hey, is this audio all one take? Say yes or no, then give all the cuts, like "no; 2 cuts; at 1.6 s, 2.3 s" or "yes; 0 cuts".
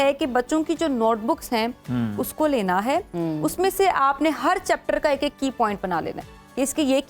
yes; 0 cuts